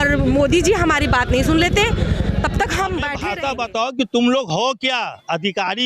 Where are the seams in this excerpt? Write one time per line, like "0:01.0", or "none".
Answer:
0:03.2